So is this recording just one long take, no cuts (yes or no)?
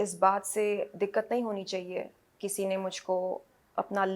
no